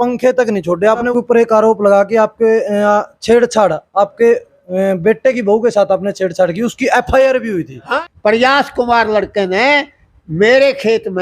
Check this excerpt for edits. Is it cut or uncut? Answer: cut